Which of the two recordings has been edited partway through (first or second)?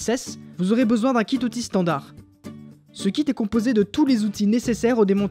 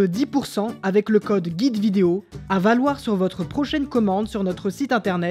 second